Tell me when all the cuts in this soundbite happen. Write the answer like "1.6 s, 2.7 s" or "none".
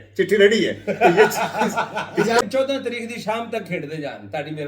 2.4 s